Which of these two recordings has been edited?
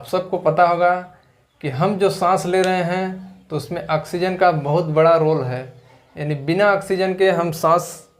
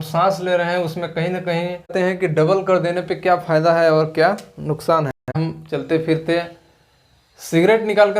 second; 2 cuts; at 1.9 s, 5.4 s

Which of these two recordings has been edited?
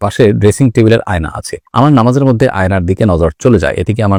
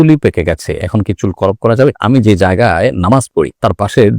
second; 1 cut; at 2.0 s

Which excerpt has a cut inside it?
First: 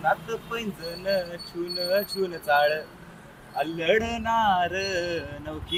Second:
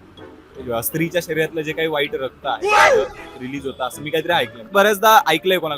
second; 1 cut; at 4.7 s

